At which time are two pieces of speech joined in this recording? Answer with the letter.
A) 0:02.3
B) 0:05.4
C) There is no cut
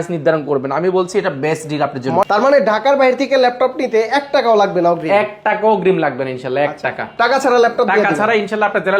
A